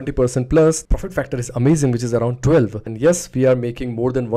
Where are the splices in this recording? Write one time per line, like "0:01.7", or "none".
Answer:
0:00.8
0:02.8